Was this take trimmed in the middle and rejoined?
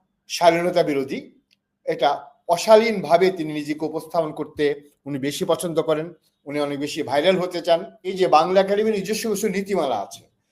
yes; 1 cut; at 8.1 s

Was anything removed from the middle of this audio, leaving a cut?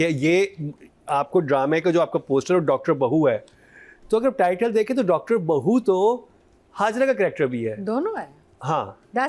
no; 0 cuts

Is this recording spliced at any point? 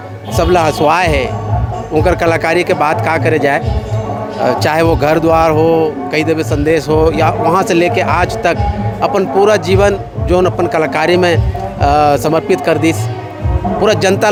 no; 0 cuts

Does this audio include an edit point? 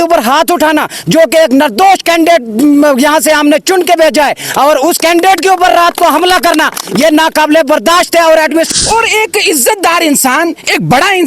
yes; 1 cut; at 8.7 s

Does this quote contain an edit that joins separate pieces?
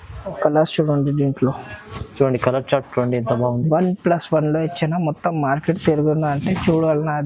no; 0 cuts

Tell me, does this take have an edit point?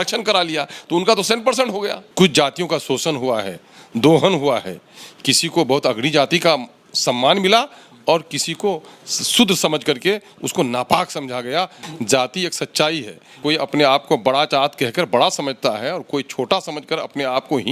yes; 3 cuts; at 2.0 s, 11.9 s, 13.4 s

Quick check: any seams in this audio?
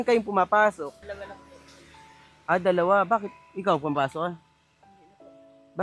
yes; 1 cut; at 1.0 s

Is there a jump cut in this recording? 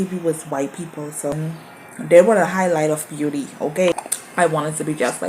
yes; 2 cuts; at 1.3 s, 3.9 s

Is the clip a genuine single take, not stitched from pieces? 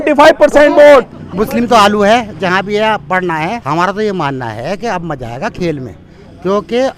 no; 2 cuts; at 1.2 s, 3.6 s

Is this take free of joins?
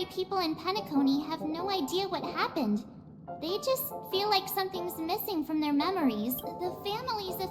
no; 1 cut; at 6.5 s

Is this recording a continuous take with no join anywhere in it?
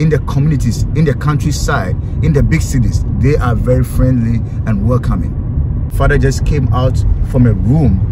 no; 1 cut; at 5.9 s

